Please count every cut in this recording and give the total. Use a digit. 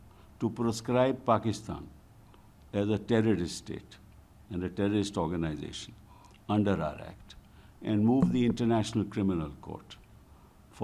0